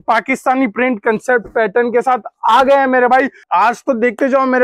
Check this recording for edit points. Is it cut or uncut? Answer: cut